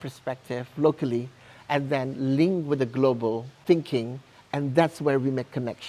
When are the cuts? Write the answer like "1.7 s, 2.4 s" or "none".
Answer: 3.6 s